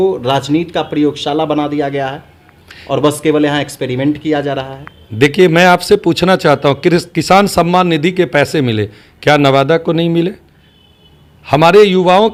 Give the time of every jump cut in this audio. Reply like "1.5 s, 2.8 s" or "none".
none